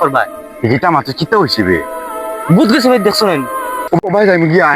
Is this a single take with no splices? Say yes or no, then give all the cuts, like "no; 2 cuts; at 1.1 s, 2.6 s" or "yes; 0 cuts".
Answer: no; 1 cut; at 3.8 s